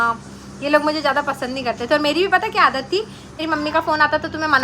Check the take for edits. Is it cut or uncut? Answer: cut